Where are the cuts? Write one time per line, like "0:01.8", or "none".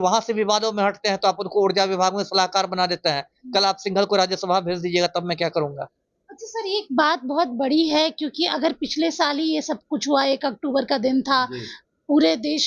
none